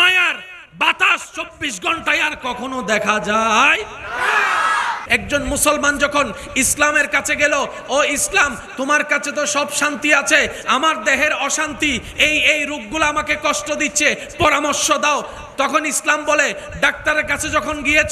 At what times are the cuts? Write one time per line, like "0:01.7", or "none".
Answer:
0:05.0